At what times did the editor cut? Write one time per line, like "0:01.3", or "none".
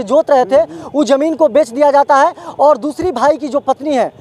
none